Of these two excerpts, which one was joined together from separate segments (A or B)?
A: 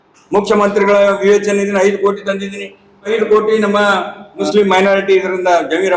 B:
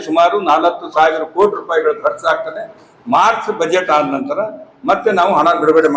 A